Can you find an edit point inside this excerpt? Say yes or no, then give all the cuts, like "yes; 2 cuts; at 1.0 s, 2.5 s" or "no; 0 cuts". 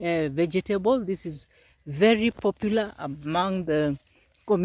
no; 0 cuts